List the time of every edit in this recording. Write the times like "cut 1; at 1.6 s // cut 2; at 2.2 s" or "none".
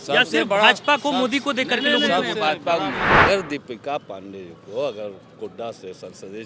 cut 1; at 3.1 s